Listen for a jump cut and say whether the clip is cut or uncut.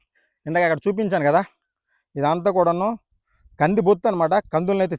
uncut